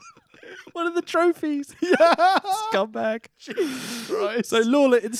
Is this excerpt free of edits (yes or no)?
yes